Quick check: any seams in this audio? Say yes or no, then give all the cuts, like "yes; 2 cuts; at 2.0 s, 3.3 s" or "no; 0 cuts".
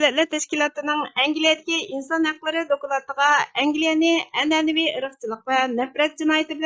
no; 0 cuts